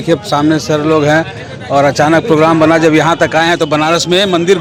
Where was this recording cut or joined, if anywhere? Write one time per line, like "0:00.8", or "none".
none